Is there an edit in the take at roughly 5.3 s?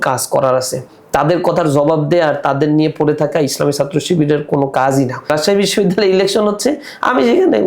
yes; 1 cut; at 5.3 s

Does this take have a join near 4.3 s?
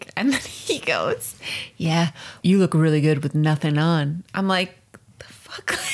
no; 1 cut; at 2.4 s

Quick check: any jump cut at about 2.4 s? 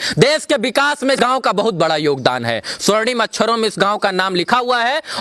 no; 1 cut; at 1.2 s

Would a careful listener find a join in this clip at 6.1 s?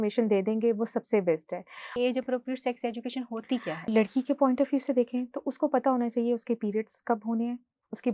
no; 2 cuts; at 1.9 s, 3.9 s

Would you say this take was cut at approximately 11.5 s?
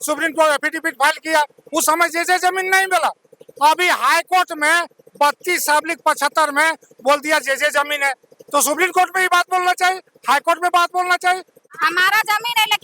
yes; 1 cut; at 11.5 s

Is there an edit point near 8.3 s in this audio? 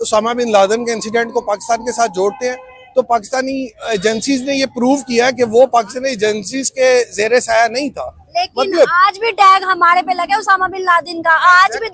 no; 0 cuts

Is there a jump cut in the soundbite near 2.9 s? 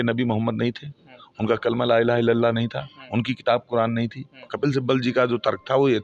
no; 1 cut; at 4.5 s

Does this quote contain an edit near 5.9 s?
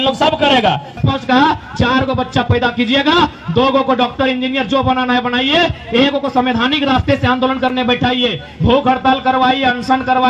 no; 1 cut; at 0.9 s

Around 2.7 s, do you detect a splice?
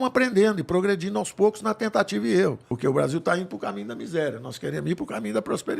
yes; 1 cut; at 2.7 s

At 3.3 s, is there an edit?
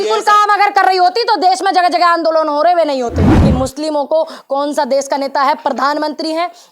yes; 1 cut; at 3.3 s

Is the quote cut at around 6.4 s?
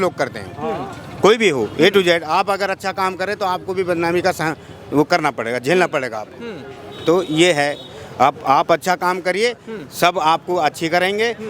no; 0 cuts

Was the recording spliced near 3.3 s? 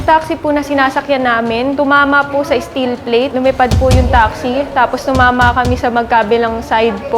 yes; 2 cuts; at 1.8 s, 3.3 s

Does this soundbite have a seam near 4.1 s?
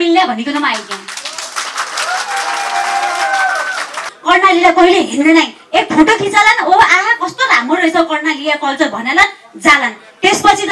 yes; 1 cut; at 4.1 s

